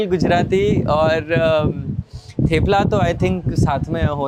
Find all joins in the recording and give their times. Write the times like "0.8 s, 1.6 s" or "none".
none